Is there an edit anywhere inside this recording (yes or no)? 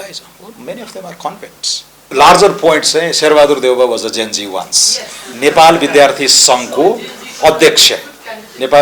yes